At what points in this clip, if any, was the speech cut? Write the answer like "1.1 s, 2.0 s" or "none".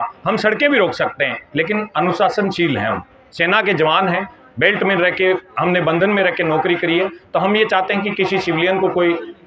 none

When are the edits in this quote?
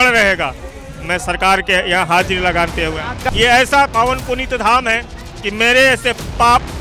3.1 s

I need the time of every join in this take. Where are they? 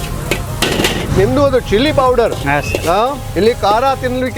1.1 s

